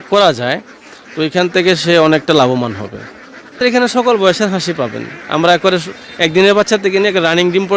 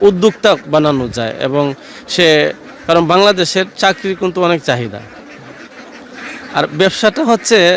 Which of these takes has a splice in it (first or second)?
first